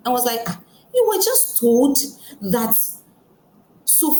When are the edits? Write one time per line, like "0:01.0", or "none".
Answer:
none